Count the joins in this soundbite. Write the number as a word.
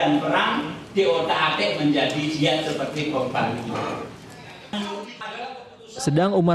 one